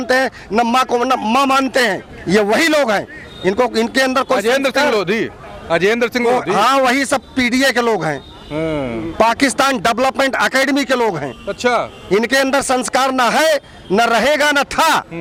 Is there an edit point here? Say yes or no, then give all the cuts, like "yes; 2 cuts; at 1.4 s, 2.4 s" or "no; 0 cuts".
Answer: no; 0 cuts